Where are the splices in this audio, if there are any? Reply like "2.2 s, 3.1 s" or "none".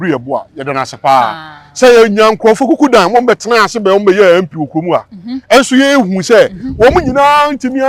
none